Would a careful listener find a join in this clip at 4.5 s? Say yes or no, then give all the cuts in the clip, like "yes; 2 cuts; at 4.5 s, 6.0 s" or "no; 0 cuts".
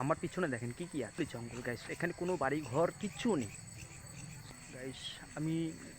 yes; 2 cuts; at 1.2 s, 4.5 s